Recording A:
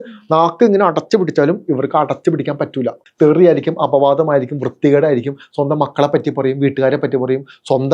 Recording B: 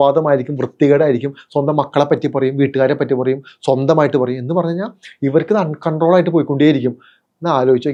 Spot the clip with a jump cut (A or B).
A